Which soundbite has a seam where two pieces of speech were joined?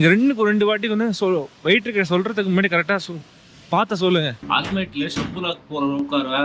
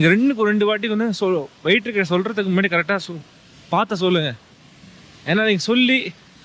first; 1 cut; at 4.4 s

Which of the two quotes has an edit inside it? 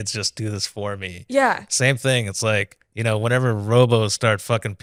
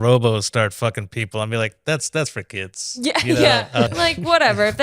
second; 1 cut; at 3.9 s

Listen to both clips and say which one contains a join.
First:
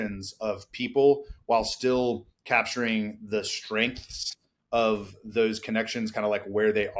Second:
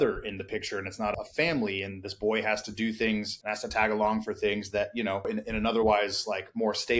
second; 3 cuts; at 1.1 s, 3.4 s, 5.3 s

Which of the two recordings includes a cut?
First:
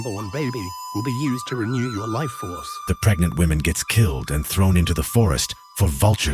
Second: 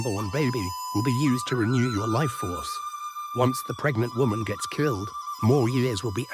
first; 1 cut; at 2.8 s

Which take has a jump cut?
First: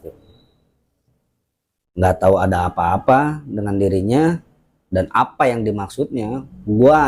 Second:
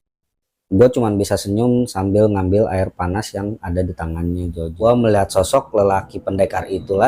second; 1 cut; at 4.8 s

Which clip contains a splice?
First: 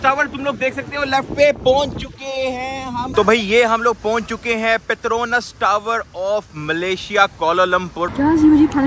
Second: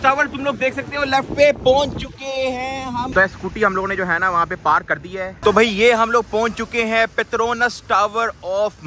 first; 2 cuts; at 3.1 s, 8.1 s

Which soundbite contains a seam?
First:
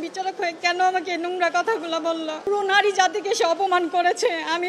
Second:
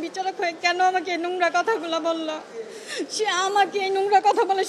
first; 1 cut; at 2.5 s

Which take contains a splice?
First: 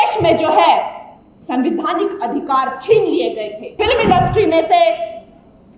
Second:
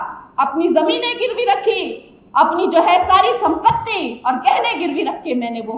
first; 1 cut; at 3.8 s

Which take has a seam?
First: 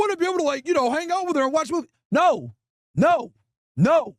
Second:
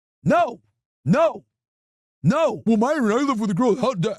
second; 1 cut; at 2.6 s

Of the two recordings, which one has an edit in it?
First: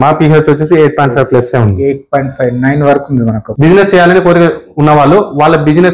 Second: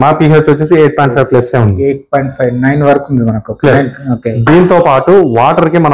first; 1 cut; at 3.5 s

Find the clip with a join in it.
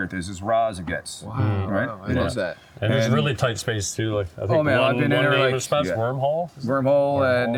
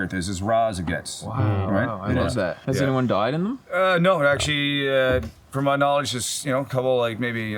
second; 1 cut; at 2.6 s

